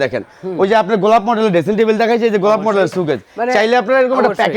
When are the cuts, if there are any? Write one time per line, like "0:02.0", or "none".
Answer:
none